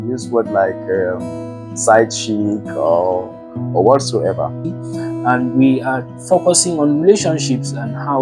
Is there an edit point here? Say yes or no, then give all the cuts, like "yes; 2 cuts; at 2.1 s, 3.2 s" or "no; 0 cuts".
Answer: yes; 1 cut; at 4.8 s